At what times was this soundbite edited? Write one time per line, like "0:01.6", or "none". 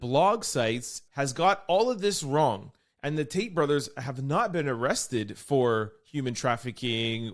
0:01.0